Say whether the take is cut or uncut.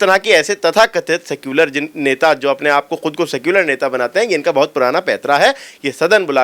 uncut